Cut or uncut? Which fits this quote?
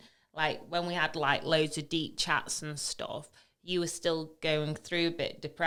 uncut